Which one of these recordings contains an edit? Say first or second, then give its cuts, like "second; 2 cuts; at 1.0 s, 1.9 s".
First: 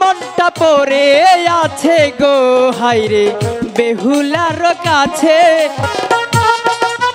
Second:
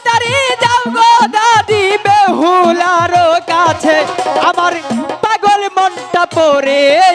first; 1 cut; at 5.8 s